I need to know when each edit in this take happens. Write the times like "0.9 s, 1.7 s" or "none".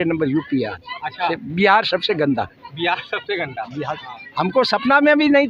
1.3 s, 4.0 s